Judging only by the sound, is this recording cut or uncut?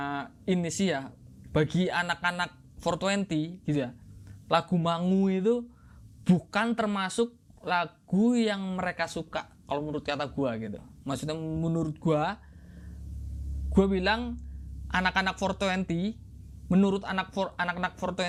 uncut